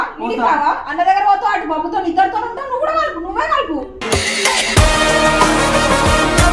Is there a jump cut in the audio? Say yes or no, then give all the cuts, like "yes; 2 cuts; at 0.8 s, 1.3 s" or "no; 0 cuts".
no; 0 cuts